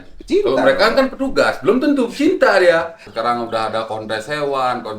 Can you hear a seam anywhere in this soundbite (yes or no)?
yes